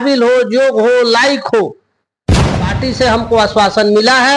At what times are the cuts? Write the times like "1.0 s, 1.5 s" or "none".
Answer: 2.4 s